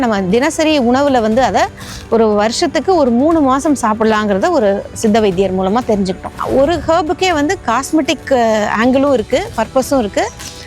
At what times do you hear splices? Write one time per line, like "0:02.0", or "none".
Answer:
0:06.3